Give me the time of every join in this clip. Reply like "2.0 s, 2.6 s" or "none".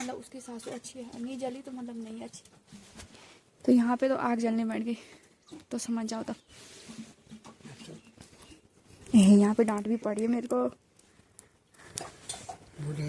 none